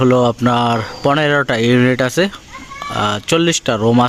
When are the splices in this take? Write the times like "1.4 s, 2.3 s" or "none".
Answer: none